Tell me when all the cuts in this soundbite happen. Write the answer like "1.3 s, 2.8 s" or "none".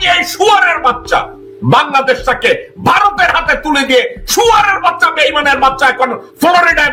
none